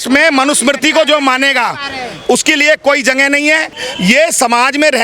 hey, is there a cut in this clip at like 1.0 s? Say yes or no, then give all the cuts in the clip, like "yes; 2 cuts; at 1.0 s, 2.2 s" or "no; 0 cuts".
no; 1 cut; at 3.8 s